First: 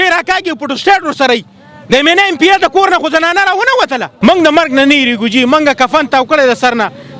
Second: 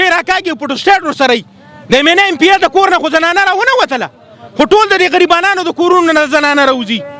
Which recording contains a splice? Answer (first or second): first